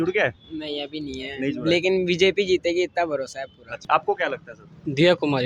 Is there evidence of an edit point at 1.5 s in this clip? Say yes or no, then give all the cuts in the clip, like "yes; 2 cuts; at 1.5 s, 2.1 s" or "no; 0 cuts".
no; 1 cut; at 3.8 s